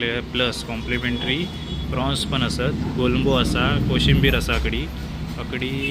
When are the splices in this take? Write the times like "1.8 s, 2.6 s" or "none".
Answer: none